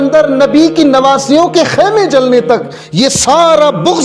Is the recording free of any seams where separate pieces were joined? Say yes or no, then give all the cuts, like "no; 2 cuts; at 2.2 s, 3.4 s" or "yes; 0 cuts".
yes; 0 cuts